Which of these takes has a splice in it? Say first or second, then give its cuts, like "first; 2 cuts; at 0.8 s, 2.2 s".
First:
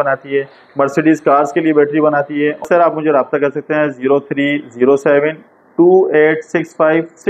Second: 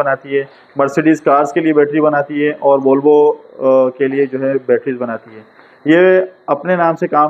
first; 1 cut; at 2.6 s